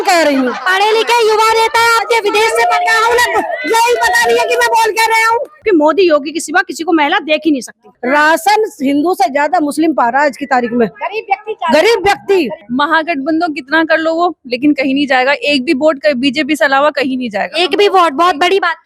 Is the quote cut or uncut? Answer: cut